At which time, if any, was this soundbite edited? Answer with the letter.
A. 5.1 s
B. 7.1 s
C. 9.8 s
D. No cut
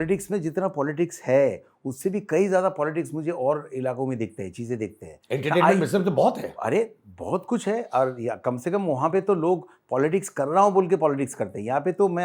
D